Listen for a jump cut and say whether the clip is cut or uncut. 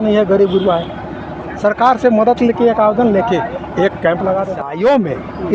cut